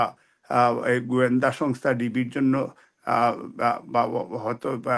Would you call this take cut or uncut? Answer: uncut